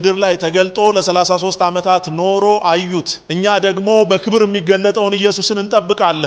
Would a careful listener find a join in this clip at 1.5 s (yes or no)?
no